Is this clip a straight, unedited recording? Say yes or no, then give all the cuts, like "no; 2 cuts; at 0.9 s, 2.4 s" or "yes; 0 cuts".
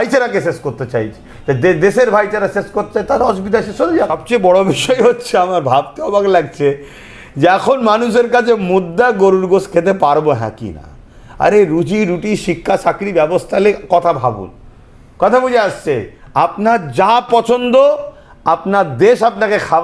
no; 1 cut; at 4.2 s